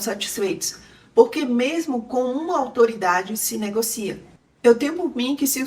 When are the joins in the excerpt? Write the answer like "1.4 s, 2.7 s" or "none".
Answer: 4.3 s